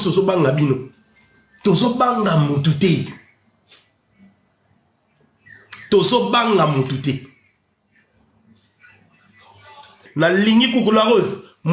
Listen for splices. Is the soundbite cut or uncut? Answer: cut